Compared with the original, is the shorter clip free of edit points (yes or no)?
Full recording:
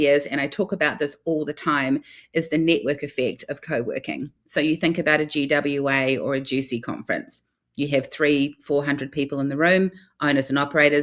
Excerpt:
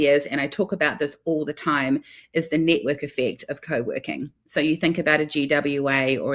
yes